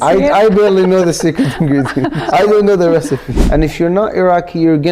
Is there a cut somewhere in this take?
yes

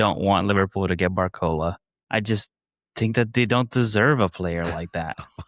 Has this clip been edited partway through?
yes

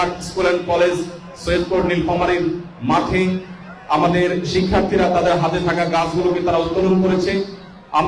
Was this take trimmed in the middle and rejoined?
no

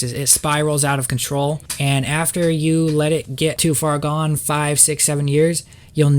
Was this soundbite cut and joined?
yes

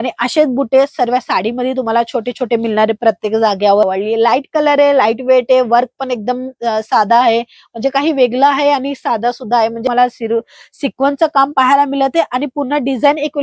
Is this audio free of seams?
no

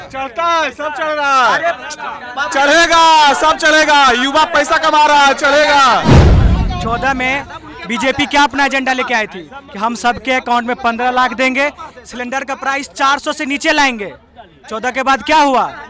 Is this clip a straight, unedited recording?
no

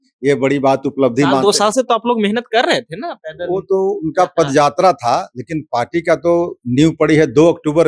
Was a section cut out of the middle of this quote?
no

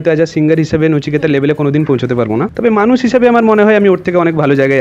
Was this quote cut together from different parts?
yes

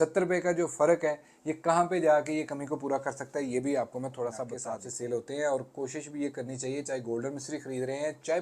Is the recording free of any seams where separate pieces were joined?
no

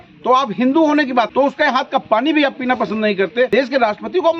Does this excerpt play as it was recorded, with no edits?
no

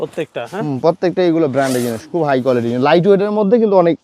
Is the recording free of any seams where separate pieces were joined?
yes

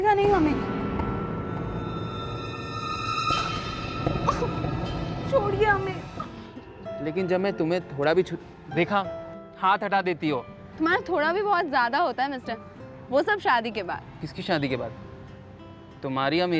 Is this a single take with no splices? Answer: no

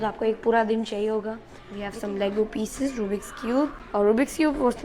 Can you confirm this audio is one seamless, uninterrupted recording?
no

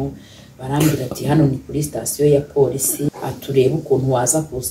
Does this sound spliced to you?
yes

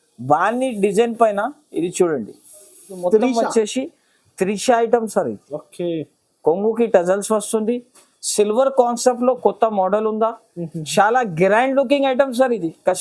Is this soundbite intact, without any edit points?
no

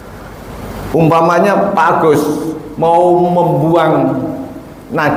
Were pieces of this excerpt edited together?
no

